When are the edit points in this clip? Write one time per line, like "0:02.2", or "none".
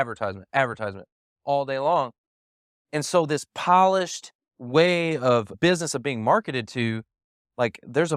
0:05.5